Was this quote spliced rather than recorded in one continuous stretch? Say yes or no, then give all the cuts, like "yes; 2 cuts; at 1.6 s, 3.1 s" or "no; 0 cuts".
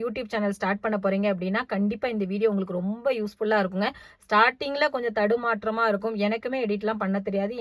no; 0 cuts